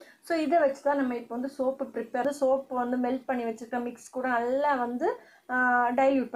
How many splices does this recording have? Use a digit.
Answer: 1